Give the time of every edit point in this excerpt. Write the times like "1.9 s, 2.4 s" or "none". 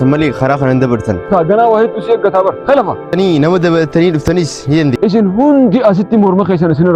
1.2 s, 3.1 s, 5.0 s